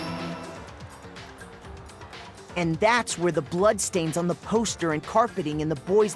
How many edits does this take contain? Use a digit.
2